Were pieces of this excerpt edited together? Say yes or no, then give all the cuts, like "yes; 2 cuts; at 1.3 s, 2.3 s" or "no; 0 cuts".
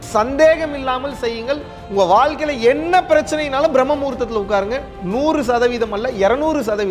no; 0 cuts